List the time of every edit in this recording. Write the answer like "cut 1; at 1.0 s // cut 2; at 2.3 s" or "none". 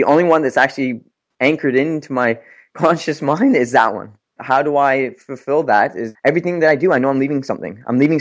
cut 1; at 4.4 s // cut 2; at 6.1 s